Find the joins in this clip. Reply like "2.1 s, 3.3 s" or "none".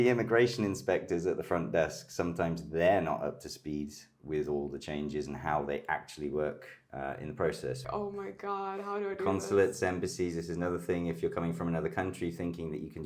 7.8 s